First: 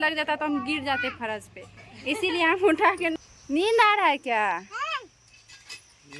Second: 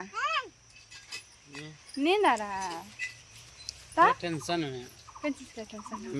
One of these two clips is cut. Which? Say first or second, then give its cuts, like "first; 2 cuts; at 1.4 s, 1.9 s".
first; 1 cut; at 3.2 s